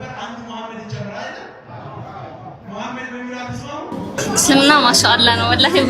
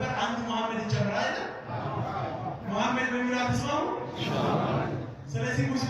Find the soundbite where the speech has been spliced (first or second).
first